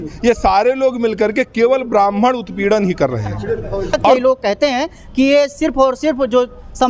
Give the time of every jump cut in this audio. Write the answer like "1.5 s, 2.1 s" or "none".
4.1 s